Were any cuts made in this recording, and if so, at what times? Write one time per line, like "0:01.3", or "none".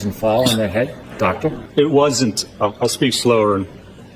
0:01.6